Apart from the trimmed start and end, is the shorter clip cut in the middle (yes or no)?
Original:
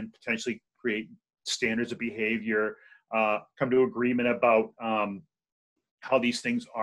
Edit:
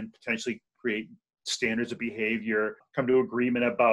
yes